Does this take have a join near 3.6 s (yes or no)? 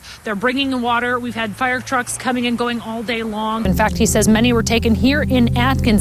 yes